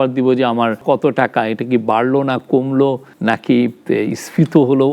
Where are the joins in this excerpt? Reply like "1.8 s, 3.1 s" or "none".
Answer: 0.8 s, 3.1 s